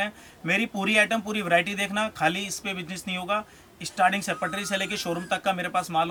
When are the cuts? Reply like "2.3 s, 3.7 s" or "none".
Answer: none

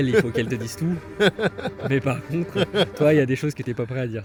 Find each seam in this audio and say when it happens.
none

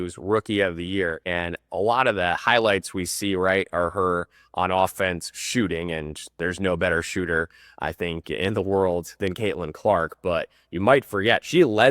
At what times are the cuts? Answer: 1.3 s

